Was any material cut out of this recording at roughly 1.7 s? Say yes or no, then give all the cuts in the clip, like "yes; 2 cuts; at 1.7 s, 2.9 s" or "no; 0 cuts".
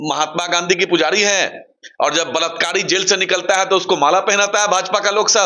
no; 0 cuts